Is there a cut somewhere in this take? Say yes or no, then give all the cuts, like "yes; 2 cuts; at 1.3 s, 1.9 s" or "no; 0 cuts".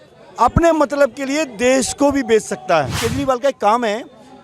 yes; 1 cut; at 3.0 s